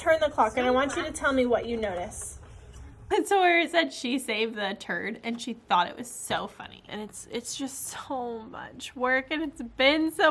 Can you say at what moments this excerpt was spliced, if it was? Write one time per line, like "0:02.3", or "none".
0:03.1
0:06.9